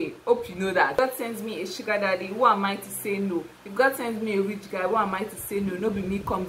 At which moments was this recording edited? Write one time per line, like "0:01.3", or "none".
0:01.0